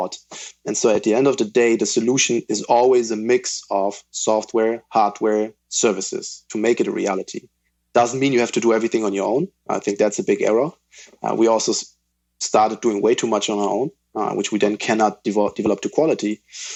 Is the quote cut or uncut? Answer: uncut